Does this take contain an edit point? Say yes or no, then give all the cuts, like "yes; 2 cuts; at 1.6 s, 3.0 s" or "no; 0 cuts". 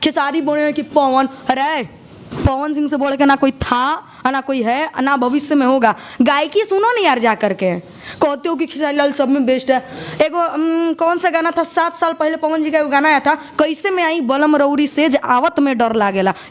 no; 0 cuts